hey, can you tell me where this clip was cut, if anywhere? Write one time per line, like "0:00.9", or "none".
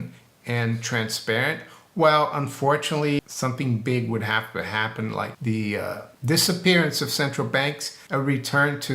0:03.2
0:05.3
0:06.1
0:07.9